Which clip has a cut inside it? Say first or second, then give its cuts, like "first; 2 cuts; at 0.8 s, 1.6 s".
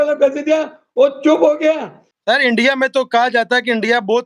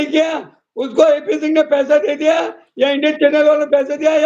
first; 1 cut; at 2.1 s